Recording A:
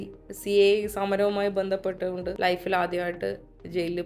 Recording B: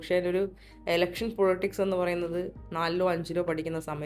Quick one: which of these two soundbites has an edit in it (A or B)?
A